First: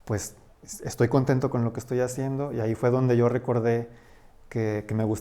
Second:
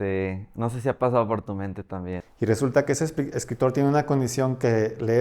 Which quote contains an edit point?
second; 1 cut; at 2.1 s

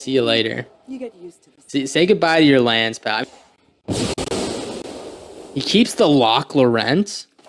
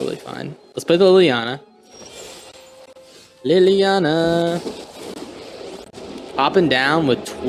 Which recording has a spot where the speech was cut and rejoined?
first; 1 cut; at 3.2 s

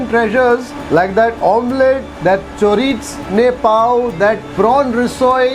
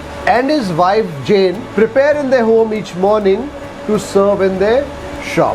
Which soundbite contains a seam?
second; 1 cut; at 1.6 s

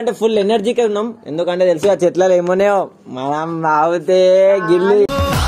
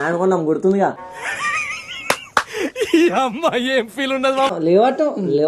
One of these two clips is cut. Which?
second; 1 cut; at 4.5 s

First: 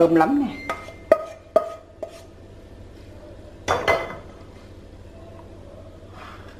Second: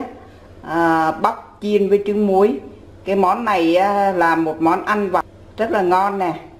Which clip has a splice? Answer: second; 1 cut; at 5.4 s

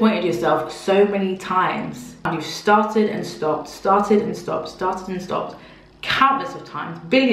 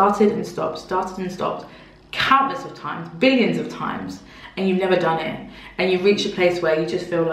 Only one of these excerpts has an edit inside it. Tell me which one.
first; 1 cut; at 2.4 s

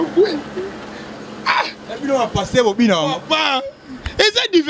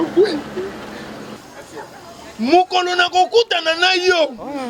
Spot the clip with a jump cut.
second; 1 cut; at 1.3 s

